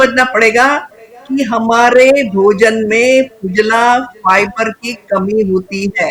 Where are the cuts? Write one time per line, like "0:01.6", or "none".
none

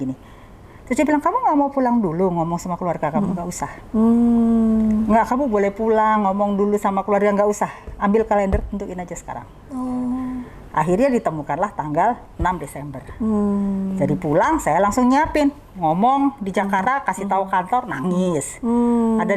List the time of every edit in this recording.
none

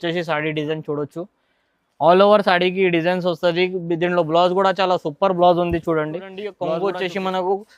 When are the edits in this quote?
0:06.6

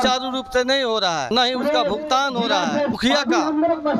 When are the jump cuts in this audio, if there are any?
0:01.3
0:03.0

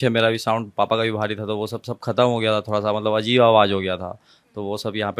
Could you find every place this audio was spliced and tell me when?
none

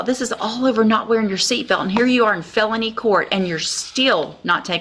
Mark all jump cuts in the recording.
none

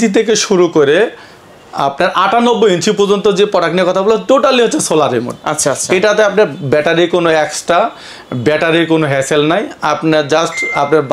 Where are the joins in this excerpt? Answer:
none

